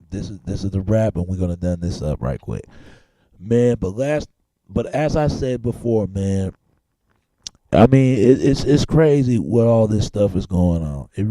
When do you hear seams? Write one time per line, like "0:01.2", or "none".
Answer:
0:04.5

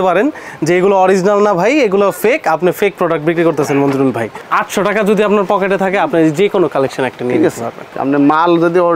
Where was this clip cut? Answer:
0:04.3
0:07.9

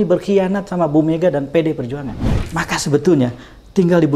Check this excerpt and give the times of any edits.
0:02.3

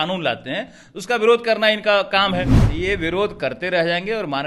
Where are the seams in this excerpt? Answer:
0:02.6

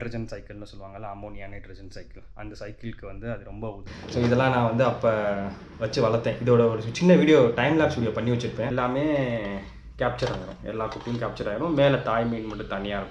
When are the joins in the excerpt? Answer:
0:03.9
0:08.7

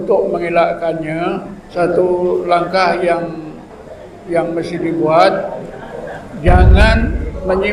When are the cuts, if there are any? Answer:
0:01.7

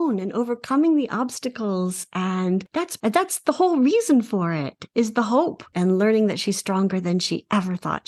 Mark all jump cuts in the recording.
0:02.9
0:04.8
0:05.7

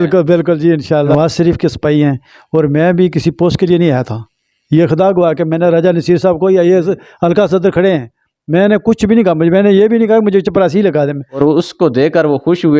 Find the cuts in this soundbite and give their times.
0:01.1
0:11.4

